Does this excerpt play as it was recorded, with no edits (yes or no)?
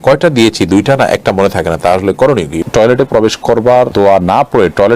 no